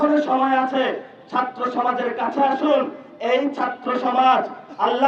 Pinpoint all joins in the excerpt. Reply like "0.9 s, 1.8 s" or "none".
none